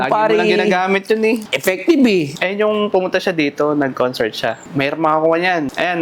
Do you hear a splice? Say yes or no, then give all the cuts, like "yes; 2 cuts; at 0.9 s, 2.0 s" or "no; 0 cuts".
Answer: yes; 3 cuts; at 1.5 s, 2.3 s, 4.7 s